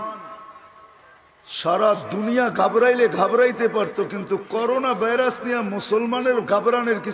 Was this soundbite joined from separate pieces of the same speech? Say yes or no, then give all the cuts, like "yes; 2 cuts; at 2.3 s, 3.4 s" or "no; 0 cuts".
no; 0 cuts